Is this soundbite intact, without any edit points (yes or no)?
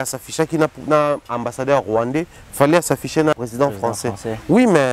no